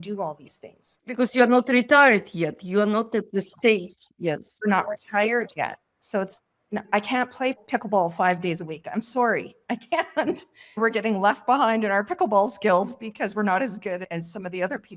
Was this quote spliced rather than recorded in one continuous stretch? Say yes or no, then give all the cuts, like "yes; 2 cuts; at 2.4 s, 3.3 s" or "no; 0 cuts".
yes; 1 cut; at 4.5 s